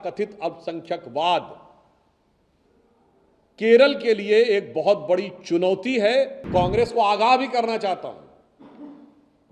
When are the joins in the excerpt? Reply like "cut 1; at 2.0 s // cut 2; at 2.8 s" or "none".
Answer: cut 1; at 6.4 s